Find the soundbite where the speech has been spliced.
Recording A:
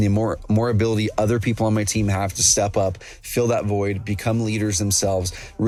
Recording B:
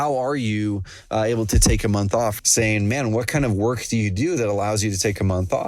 B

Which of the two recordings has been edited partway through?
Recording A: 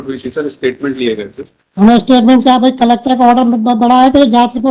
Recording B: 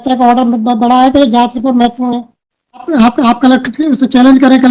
B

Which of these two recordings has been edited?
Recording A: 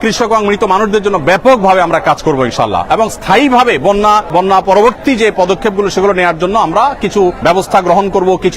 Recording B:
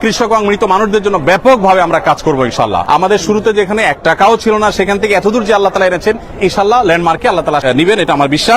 B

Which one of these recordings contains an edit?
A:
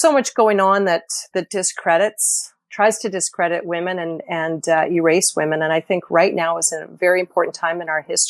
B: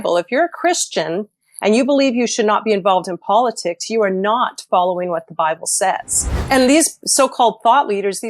B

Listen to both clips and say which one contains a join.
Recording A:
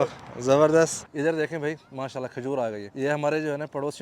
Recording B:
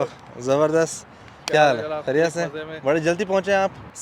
A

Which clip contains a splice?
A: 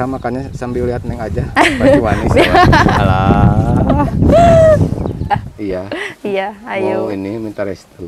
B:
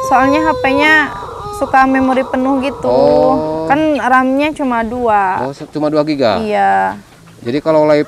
A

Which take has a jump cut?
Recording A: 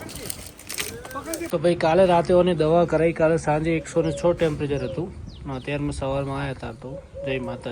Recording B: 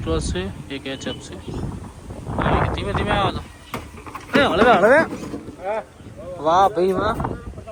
A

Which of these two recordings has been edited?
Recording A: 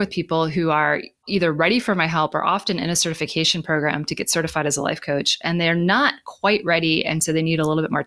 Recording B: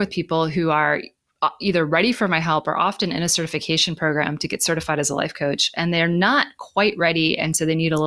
A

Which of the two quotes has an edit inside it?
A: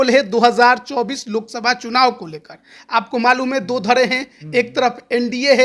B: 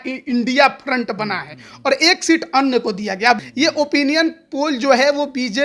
B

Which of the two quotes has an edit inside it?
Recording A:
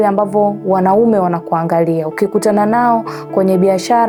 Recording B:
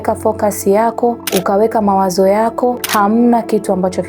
B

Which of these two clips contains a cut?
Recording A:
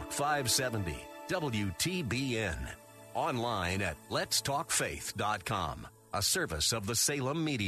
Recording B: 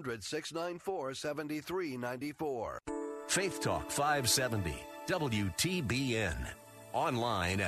B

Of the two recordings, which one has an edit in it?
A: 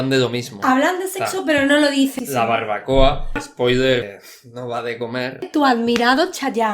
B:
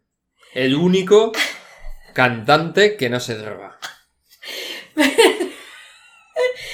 A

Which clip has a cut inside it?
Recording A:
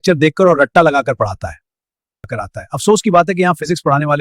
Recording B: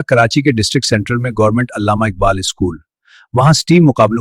A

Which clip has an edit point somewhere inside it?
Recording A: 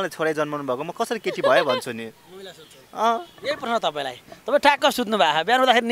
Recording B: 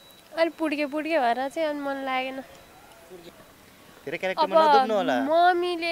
B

